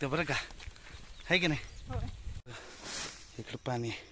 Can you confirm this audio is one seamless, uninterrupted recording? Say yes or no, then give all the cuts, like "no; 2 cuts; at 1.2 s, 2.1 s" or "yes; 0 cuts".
no; 1 cut; at 2.4 s